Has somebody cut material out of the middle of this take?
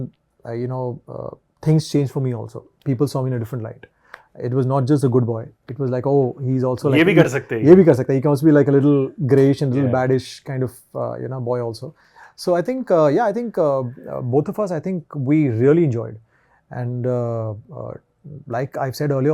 no; 0 cuts

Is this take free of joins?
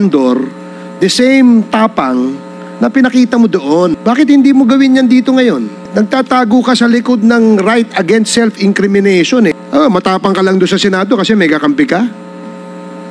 no; 3 cuts; at 4.0 s, 5.8 s, 9.5 s

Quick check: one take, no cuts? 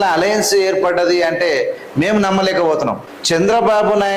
no; 1 cut; at 3.1 s

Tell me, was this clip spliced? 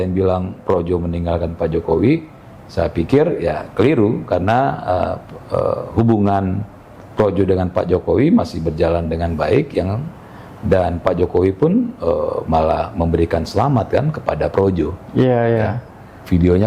no; 0 cuts

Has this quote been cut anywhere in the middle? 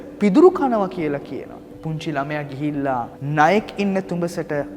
yes; 2 cuts; at 1.7 s, 3.2 s

